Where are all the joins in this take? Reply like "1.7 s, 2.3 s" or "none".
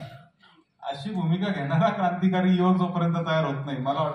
none

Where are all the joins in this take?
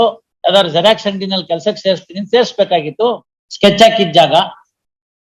3.0 s

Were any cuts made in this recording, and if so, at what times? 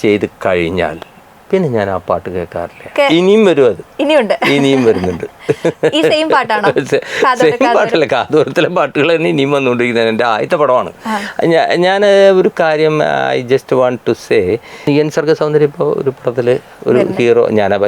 2.9 s, 14.8 s

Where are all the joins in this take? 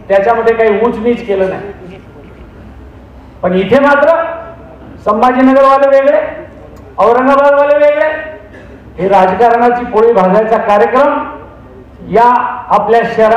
none

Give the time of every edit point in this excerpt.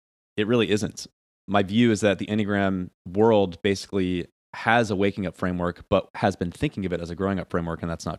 1.2 s

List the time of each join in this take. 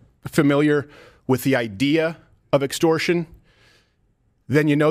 none

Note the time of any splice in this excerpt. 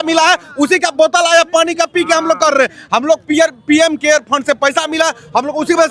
none

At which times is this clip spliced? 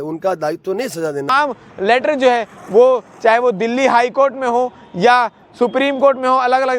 1.3 s

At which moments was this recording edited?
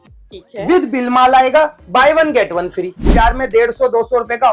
3.1 s

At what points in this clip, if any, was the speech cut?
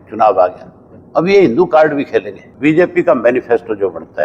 2.4 s

